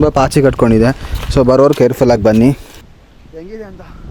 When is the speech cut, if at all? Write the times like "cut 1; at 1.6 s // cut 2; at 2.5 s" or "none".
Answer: cut 1; at 2.8 s